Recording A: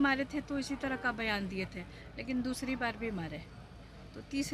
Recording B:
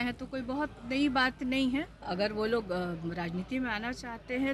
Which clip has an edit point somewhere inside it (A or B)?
B